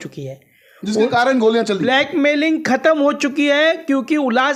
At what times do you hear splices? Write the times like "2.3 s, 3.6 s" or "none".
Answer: none